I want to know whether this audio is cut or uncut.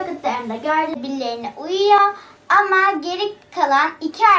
cut